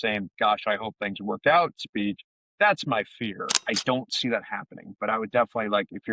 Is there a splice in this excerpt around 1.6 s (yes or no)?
no